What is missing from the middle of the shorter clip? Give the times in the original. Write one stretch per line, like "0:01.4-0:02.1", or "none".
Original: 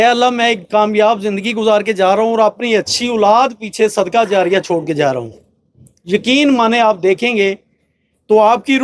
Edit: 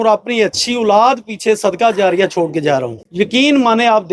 0:05.3-0:05.9